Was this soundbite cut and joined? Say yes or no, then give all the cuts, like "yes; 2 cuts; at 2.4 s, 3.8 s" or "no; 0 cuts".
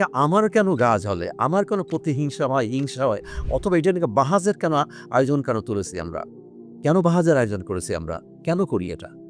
no; 0 cuts